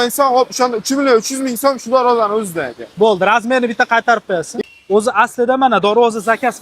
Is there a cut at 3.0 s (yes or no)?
no